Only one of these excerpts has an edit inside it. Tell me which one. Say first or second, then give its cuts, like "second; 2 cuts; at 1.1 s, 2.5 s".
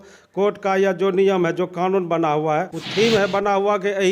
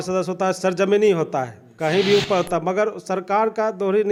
first; 1 cut; at 2.8 s